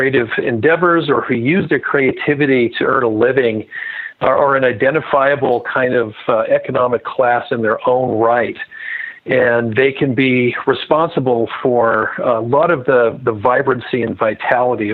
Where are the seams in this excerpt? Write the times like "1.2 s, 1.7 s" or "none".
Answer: none